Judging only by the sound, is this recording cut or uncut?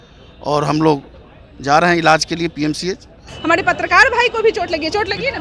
cut